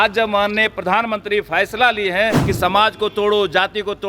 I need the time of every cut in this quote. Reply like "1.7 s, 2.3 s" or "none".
2.4 s